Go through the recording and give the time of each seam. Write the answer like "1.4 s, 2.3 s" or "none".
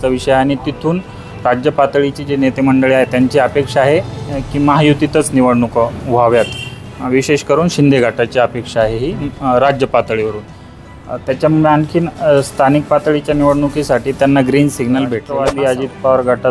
15.3 s